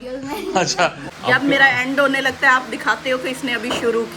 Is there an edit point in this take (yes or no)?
yes